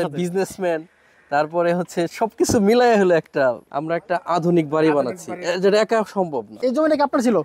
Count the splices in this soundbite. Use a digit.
2